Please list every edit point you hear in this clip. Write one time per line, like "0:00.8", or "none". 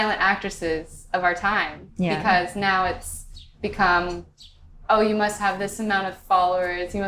none